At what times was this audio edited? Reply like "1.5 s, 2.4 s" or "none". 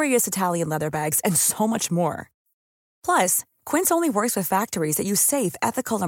none